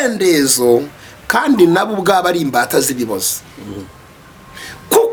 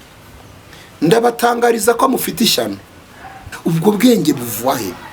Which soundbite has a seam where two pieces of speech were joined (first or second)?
second